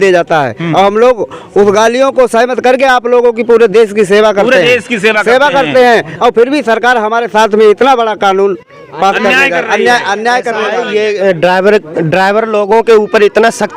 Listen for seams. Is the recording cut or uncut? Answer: cut